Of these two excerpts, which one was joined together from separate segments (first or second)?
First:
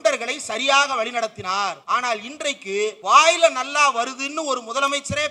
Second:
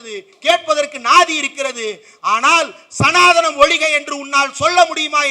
first